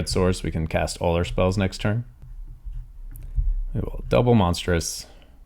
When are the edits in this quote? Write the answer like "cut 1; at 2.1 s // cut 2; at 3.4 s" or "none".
cut 1; at 2.2 s